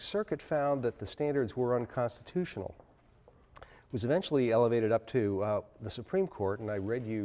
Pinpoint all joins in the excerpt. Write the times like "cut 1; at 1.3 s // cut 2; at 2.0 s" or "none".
cut 1; at 5.9 s